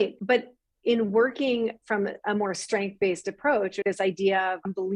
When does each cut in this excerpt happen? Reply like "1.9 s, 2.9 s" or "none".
none